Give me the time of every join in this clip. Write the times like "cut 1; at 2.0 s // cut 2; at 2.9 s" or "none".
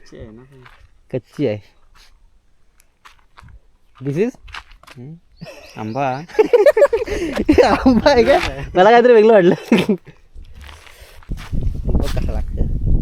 cut 1; at 7.2 s // cut 2; at 11.4 s